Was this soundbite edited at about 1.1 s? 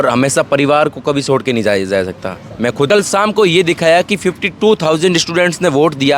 no; 1 cut; at 2.9 s

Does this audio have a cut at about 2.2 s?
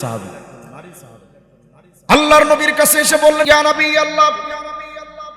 no; 1 cut; at 3.5 s

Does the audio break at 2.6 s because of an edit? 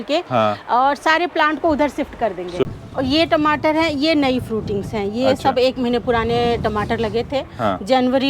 yes; 1 cut; at 2.6 s

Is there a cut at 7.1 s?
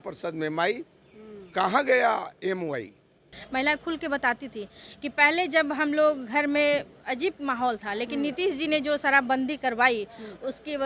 no; 1 cut; at 3.4 s

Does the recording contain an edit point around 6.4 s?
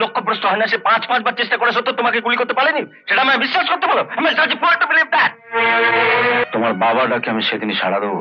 yes; 1 cut; at 6.4 s

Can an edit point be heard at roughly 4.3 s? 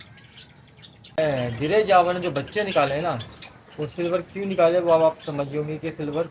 no; 1 cut; at 1.2 s

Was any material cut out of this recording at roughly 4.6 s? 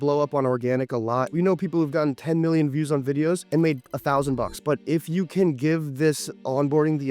yes; 2 cuts; at 1.3 s, 4.6 s

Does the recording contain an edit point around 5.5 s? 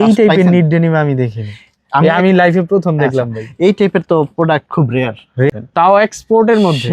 yes; 1 cut; at 5.5 s

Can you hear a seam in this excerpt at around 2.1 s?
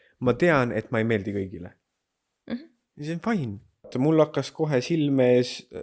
no; 1 cut; at 3.9 s

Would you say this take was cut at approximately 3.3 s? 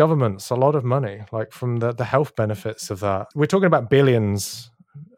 yes; 1 cut; at 3.3 s

